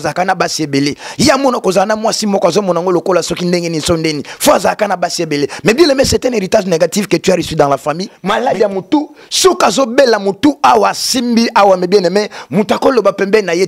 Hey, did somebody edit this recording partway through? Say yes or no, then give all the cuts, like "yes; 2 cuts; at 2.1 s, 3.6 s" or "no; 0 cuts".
yes; 1 cut; at 8.1 s